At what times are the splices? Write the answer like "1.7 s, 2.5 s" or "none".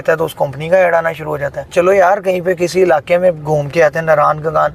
1.7 s